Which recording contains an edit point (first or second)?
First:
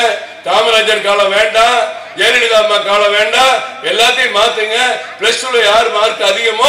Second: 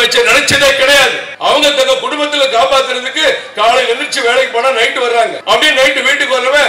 second